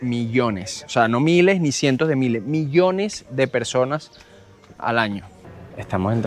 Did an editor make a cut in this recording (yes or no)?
yes